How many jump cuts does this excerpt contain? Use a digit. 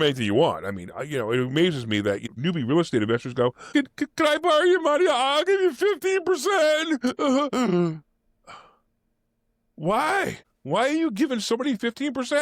3